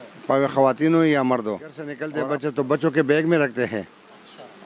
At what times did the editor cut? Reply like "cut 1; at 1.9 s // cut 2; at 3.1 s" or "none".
cut 1; at 2.0 s